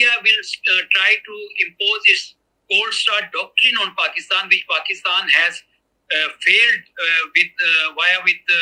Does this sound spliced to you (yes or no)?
no